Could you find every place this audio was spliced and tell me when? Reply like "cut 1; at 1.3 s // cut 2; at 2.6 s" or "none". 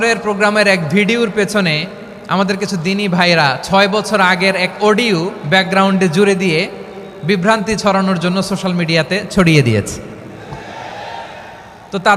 none